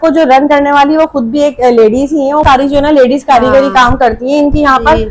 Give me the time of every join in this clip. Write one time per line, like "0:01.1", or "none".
0:02.4